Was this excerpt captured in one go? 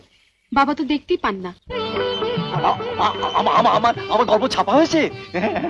yes; 0 cuts

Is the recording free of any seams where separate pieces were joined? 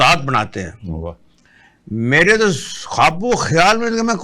yes; 0 cuts

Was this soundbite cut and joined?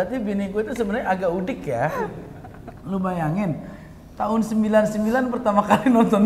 no; 0 cuts

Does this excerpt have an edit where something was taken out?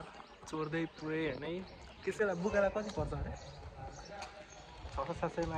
yes; 1 cut; at 2.2 s

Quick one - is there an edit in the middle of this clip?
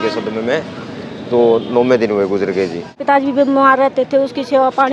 yes; 1 cut; at 3.0 s

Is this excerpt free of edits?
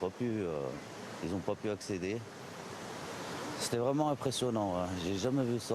no; 1 cut; at 3.9 s

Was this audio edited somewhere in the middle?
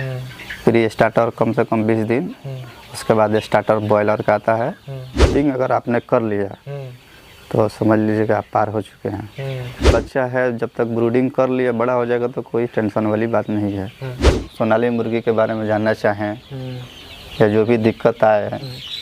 yes; 3 cuts; at 5.3 s, 9.9 s, 14.4 s

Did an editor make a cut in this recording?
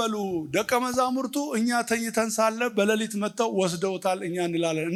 no; 0 cuts

